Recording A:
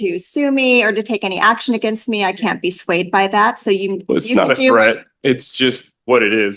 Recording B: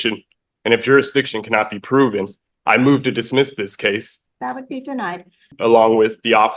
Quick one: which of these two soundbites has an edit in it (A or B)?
B